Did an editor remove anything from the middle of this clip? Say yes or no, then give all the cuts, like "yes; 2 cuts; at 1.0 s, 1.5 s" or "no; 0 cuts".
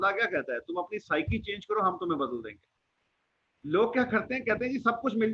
no; 0 cuts